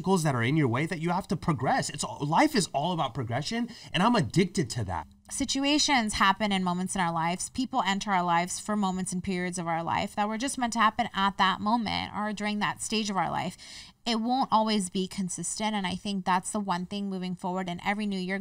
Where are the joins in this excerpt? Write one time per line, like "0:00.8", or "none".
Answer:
0:05.1